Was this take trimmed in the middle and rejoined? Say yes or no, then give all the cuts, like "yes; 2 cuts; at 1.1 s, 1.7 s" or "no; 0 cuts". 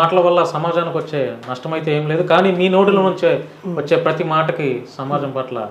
no; 0 cuts